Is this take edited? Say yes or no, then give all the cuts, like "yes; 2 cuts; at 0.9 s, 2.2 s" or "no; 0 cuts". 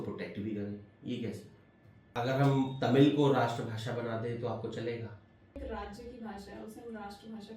yes; 2 cuts; at 2.0 s, 5.6 s